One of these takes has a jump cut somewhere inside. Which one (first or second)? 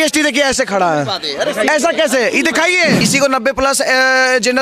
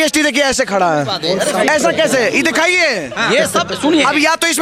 first